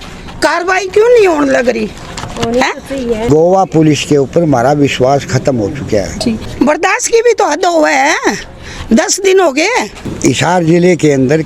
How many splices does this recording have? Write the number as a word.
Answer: three